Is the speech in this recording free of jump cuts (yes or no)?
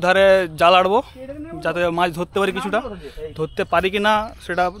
yes